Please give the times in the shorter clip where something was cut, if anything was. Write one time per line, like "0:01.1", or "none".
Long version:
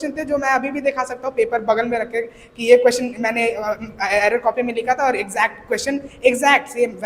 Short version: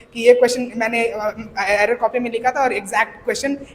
none

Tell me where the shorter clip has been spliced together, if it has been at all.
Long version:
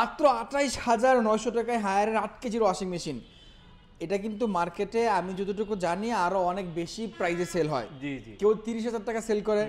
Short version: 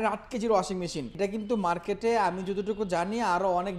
0:01.1

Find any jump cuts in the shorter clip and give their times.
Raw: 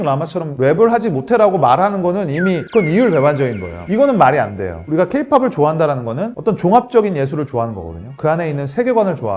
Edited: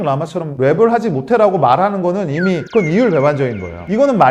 none

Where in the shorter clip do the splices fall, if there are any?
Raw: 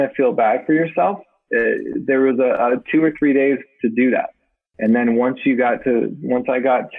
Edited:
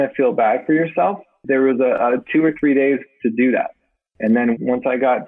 0:01.3
0:04.6

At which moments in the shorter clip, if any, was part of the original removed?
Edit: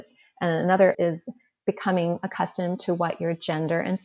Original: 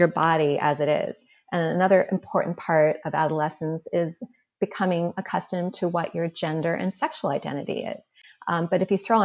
0:01.0

